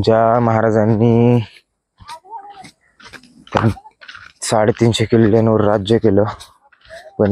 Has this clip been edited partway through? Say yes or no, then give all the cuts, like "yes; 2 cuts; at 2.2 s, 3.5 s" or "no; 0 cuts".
no; 0 cuts